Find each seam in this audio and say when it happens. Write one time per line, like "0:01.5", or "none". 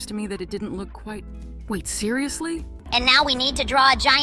0:02.7